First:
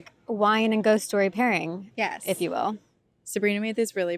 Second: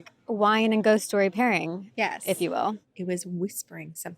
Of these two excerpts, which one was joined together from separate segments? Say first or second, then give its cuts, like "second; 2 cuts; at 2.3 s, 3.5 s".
second; 1 cut; at 2.9 s